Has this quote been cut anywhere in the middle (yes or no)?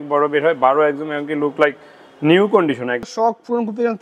yes